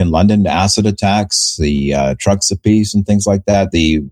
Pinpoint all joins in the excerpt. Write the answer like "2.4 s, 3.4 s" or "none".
none